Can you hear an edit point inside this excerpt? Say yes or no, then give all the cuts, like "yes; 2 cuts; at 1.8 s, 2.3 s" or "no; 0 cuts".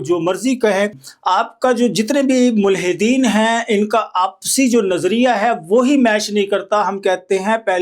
no; 0 cuts